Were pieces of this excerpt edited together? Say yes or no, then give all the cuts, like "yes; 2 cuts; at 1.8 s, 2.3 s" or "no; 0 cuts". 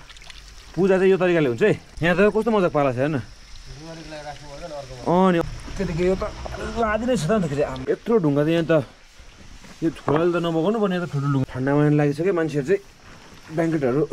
yes; 4 cuts; at 1.9 s, 5.4 s, 7.8 s, 11.4 s